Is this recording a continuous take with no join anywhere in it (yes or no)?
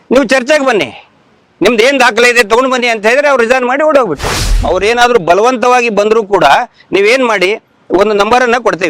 no